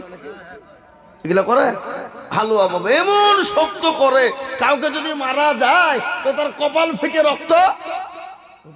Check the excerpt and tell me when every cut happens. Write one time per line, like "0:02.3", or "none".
none